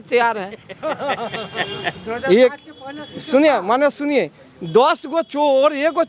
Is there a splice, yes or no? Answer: no